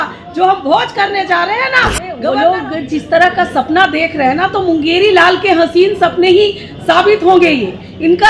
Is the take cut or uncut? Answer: cut